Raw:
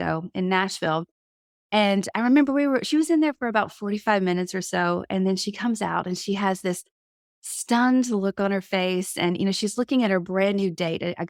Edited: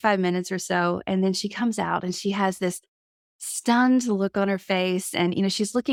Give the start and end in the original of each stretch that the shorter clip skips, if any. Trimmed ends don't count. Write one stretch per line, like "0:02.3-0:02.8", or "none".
none